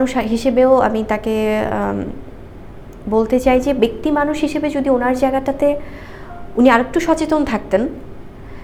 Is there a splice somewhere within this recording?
no; 0 cuts

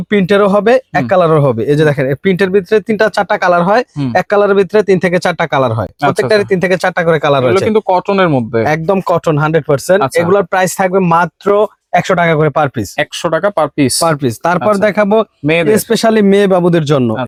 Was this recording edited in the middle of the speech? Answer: no; 0 cuts

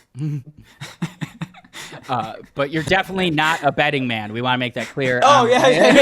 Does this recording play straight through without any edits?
no; 1 cut; at 2.8 s

